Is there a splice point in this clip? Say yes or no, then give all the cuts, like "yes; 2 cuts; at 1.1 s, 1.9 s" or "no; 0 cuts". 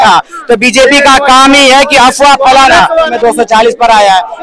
yes; 1 cut; at 3.1 s